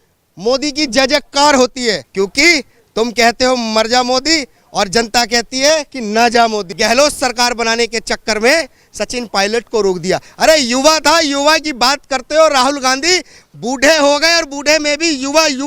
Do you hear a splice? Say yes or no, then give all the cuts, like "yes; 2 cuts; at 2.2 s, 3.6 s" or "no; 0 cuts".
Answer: yes; 2 cuts; at 2.1 s, 6.7 s